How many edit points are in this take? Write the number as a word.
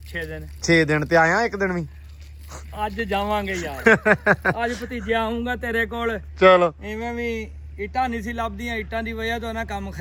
zero